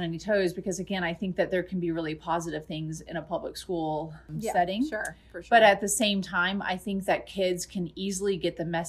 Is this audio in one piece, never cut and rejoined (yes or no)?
yes